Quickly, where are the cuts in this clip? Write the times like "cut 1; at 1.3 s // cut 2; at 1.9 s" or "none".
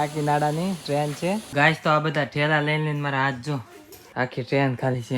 cut 1; at 1.5 s // cut 2; at 4.3 s

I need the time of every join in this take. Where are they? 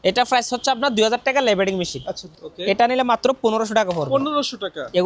cut 1; at 2.2 s

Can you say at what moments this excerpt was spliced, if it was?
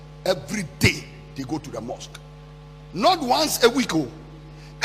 none

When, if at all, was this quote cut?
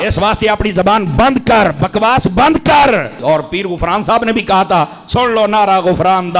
none

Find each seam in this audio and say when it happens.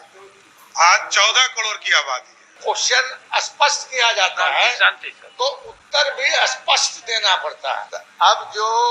cut 1; at 2.5 s // cut 2; at 8.0 s

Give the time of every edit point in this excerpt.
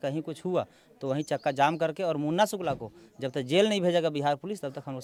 none

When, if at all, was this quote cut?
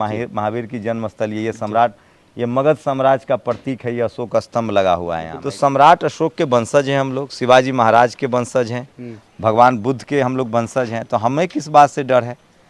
cut 1; at 5.3 s

